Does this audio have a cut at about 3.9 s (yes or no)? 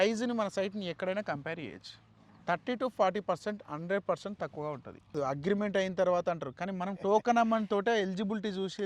no